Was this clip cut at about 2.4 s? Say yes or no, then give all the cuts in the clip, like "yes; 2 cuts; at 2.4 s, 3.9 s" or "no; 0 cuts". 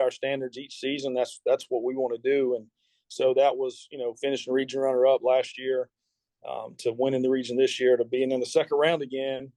no; 0 cuts